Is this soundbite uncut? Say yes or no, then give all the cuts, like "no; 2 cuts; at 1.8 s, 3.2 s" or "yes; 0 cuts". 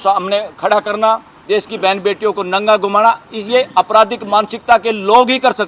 yes; 0 cuts